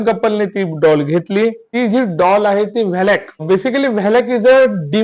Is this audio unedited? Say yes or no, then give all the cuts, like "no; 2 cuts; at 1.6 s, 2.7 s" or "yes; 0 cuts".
no; 2 cuts; at 1.6 s, 3.4 s